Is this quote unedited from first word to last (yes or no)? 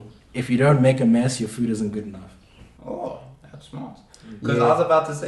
yes